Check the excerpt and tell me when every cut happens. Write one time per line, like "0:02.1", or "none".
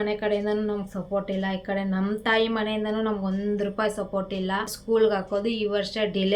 0:04.8